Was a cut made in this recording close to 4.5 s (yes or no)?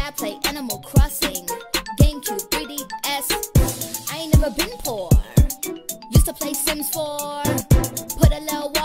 no